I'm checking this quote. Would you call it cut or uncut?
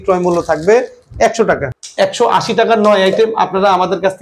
cut